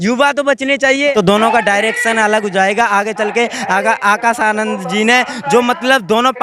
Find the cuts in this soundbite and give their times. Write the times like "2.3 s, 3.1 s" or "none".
1.1 s